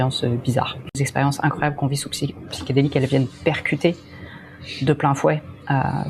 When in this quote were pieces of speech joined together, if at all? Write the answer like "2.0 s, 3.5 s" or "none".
1.0 s